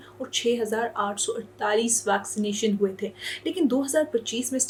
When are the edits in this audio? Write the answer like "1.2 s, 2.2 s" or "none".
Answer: none